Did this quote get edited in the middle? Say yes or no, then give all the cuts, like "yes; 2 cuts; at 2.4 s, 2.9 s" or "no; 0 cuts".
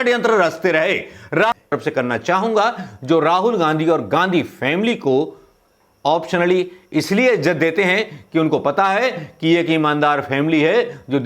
yes; 1 cut; at 1.6 s